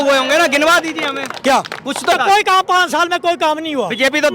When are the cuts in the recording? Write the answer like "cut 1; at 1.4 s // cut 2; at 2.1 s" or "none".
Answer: cut 1; at 2.1 s